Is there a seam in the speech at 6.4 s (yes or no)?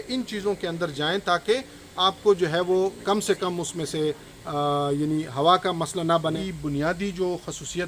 yes